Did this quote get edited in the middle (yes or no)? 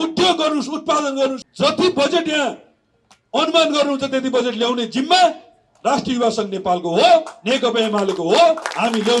yes